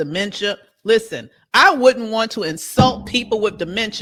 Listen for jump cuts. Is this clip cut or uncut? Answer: uncut